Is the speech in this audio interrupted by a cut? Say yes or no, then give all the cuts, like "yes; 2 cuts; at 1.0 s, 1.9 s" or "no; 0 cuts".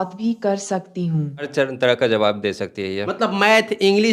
yes; 1 cut; at 1.5 s